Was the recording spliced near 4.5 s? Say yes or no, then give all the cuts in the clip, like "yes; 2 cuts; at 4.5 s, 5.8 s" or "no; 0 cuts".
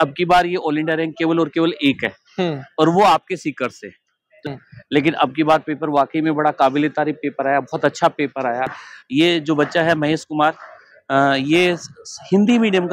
yes; 2 cuts; at 4.5 s, 8.8 s